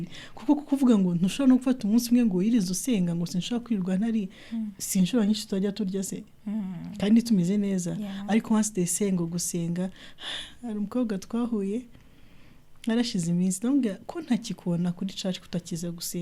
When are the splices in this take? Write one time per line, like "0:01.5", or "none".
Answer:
none